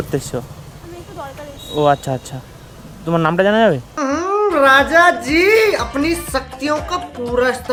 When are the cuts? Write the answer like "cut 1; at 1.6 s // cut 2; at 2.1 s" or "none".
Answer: none